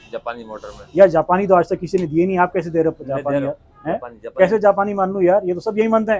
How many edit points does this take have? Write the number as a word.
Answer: zero